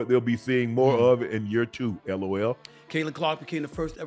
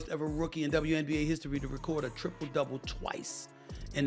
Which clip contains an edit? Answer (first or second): first